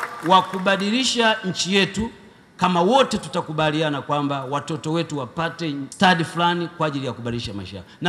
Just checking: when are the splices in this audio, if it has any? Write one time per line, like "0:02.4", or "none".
0:05.9